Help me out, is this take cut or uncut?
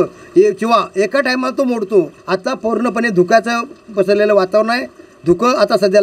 cut